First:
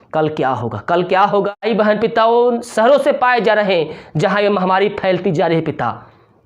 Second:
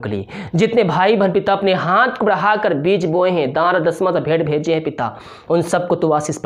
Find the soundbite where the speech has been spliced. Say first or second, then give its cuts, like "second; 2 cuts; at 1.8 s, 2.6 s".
first; 1 cut; at 1.5 s